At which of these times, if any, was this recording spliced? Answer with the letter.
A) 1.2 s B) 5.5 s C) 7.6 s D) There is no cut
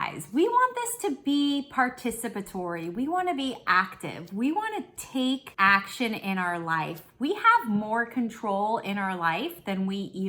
B